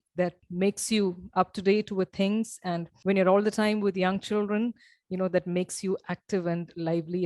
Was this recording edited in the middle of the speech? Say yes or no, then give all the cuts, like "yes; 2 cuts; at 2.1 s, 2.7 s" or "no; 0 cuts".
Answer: yes; 1 cut; at 2.9 s